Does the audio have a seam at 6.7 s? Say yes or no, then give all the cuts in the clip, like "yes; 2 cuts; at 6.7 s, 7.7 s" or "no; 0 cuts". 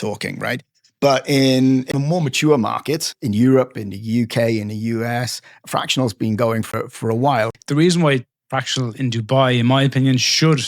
yes; 3 cuts; at 1.9 s, 6.7 s, 7.6 s